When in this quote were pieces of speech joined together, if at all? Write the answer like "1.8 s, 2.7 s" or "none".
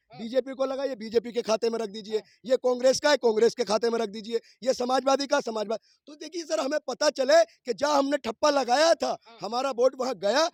none